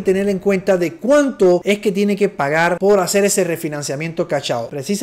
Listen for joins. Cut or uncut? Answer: cut